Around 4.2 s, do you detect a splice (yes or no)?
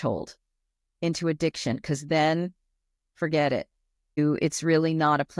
yes